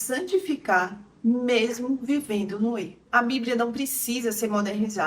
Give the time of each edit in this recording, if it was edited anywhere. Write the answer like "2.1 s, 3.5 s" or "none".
3.0 s